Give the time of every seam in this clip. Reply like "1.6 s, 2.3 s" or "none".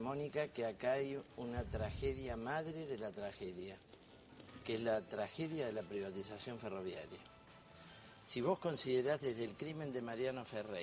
none